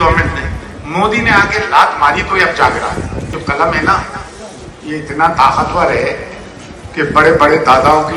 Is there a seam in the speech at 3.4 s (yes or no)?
yes